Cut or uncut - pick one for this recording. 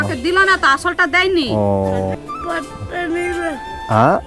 cut